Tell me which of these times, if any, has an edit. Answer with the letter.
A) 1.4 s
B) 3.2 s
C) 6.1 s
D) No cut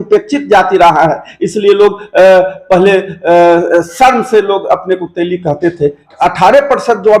C